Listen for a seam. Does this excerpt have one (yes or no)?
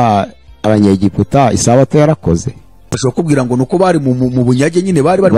yes